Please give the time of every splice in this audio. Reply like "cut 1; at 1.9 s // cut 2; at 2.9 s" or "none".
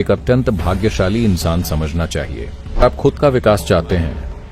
cut 1; at 2.8 s

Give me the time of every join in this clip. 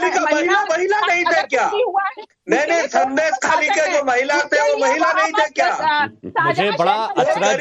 cut 1; at 2.9 s

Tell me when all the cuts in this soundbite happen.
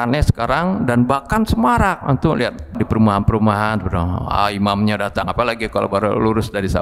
cut 1; at 2.8 s

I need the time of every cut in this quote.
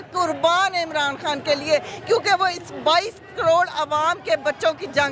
none

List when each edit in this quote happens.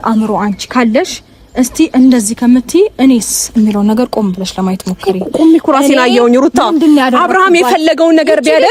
none

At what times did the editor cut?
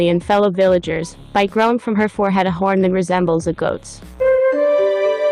cut 1; at 4.4 s

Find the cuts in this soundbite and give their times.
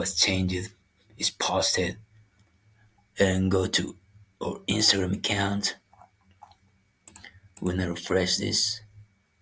none

